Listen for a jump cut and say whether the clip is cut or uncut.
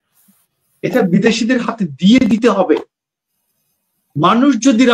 uncut